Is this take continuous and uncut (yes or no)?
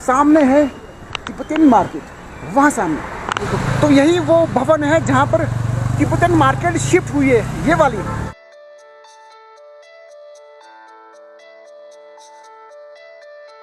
yes